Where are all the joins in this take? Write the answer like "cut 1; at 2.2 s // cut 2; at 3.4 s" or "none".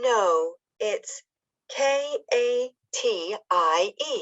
cut 1; at 2.2 s // cut 2; at 3.2 s